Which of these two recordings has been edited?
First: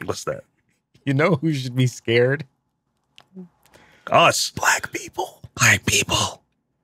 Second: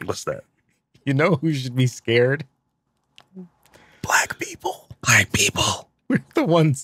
second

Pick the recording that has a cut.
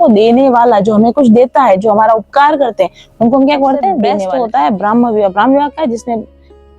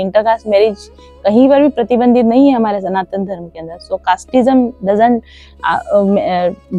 first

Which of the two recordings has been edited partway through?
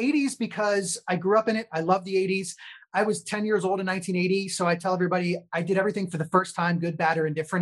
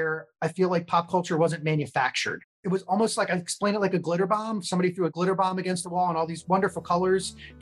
second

